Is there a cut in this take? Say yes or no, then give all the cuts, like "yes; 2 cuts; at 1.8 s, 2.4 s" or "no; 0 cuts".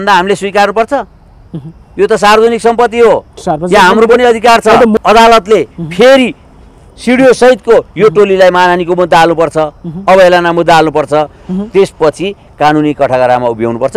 yes; 1 cut; at 4.9 s